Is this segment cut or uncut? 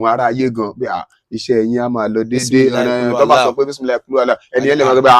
uncut